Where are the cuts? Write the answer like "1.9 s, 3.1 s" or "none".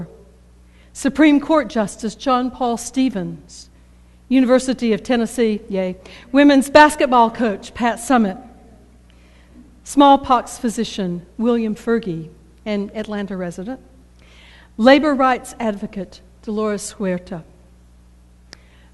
none